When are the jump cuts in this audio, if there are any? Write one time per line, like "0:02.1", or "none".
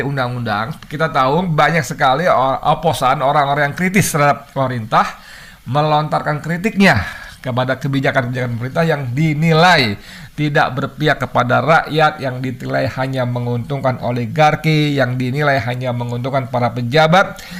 none